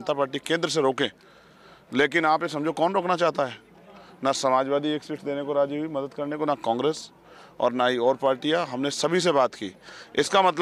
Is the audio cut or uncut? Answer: uncut